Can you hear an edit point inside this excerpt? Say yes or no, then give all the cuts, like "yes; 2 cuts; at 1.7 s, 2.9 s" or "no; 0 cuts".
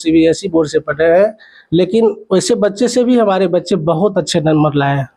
no; 0 cuts